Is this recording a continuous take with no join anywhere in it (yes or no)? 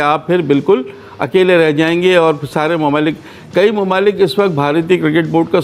yes